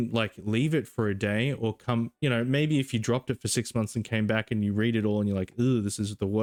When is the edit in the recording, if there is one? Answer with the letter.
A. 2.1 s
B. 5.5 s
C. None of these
C